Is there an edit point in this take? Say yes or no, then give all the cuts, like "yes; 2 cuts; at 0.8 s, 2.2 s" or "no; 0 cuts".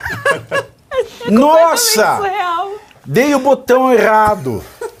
no; 0 cuts